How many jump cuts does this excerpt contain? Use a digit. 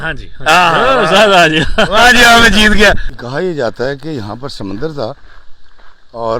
1